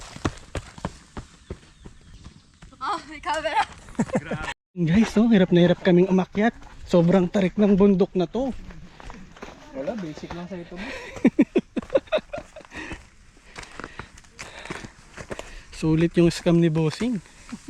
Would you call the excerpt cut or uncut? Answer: cut